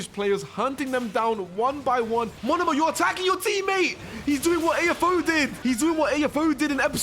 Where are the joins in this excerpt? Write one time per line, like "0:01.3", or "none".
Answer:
0:02.4
0:05.5